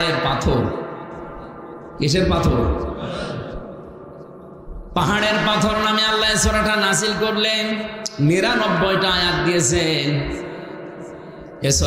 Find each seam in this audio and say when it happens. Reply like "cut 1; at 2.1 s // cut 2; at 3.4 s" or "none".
none